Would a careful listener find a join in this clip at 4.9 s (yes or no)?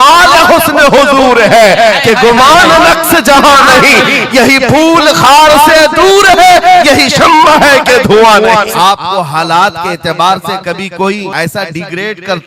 no